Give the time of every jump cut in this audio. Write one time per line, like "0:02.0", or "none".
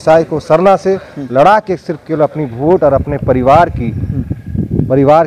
none